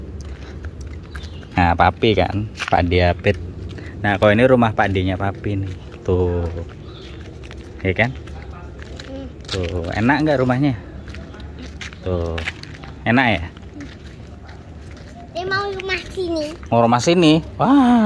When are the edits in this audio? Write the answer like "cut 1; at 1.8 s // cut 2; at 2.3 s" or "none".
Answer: none